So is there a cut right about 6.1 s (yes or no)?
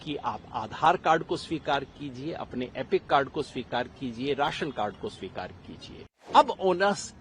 yes